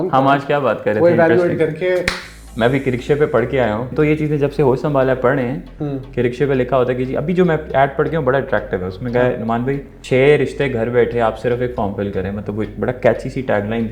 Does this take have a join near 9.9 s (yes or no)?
yes